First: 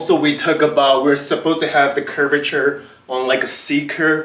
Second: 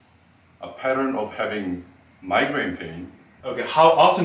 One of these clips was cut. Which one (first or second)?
second